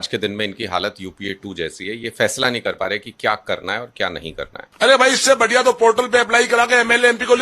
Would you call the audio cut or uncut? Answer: cut